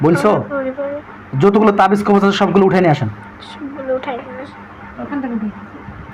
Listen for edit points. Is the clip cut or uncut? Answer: cut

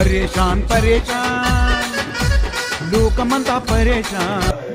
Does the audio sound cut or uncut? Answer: uncut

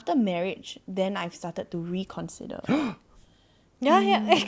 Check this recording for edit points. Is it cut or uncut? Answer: uncut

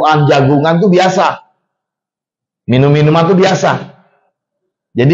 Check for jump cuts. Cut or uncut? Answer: uncut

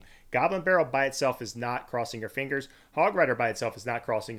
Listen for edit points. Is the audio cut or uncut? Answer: uncut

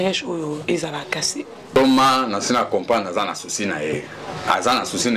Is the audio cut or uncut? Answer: cut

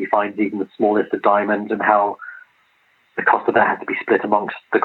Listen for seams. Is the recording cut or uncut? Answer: uncut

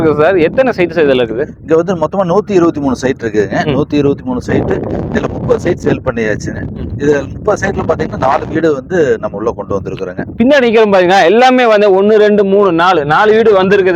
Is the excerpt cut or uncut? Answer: uncut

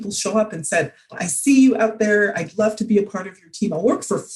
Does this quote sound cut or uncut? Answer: cut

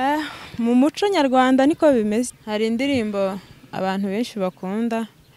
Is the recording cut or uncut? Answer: cut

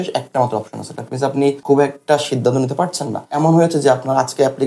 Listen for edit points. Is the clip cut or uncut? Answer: cut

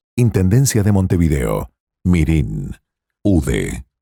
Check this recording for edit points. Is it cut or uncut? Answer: uncut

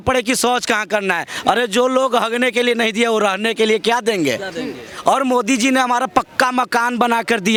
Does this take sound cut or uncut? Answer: uncut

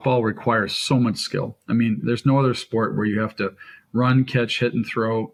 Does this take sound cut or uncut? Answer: uncut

